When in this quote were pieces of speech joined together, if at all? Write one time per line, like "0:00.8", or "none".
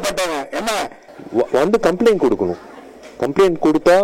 0:01.1